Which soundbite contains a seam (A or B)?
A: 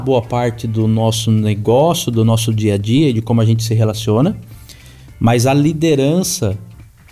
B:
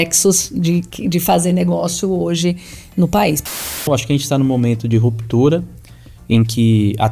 B